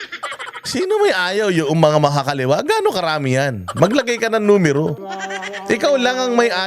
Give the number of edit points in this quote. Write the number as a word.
one